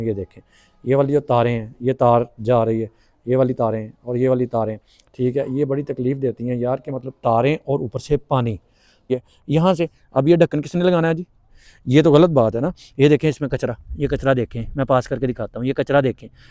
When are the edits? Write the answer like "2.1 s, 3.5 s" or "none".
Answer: 9.1 s